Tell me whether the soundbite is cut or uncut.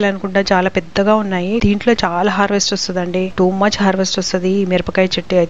cut